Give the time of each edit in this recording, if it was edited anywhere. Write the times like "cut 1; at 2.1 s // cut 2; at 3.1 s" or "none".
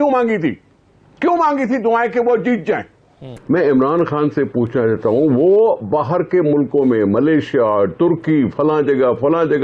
cut 1; at 3.3 s